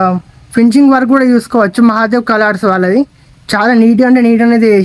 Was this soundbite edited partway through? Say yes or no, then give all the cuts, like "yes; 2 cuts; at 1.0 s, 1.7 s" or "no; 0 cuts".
no; 0 cuts